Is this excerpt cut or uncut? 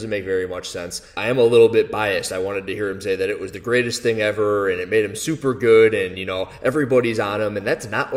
cut